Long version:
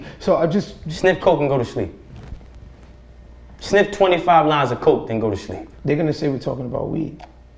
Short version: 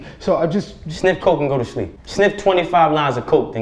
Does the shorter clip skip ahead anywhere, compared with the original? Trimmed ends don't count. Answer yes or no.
yes